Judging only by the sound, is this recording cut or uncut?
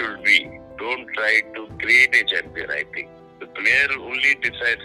cut